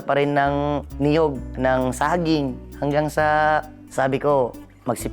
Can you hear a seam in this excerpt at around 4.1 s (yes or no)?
no